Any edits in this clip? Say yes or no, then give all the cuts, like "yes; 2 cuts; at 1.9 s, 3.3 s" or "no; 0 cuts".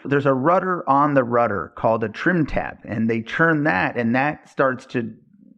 no; 0 cuts